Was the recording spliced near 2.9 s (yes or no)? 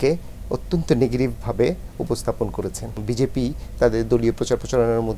yes